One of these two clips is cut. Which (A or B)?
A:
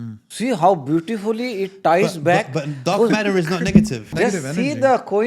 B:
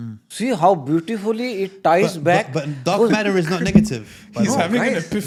A